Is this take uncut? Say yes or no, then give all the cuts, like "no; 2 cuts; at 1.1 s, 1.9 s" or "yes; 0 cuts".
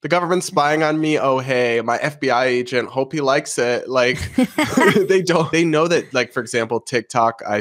no; 1 cut; at 5.5 s